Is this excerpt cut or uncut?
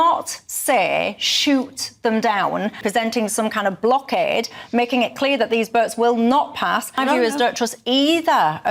cut